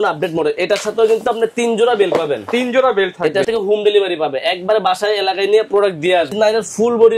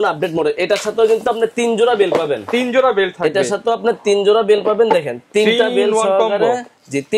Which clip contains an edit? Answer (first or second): first